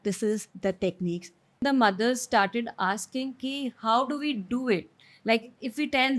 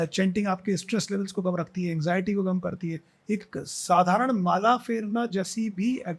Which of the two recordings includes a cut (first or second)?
first